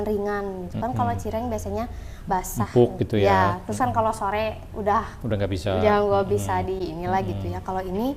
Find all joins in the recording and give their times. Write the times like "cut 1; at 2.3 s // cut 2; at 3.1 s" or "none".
none